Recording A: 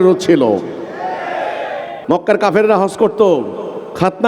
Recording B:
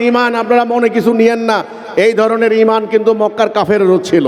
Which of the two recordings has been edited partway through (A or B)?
A